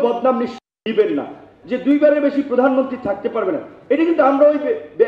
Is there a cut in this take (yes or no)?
yes